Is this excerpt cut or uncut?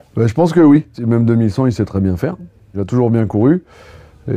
cut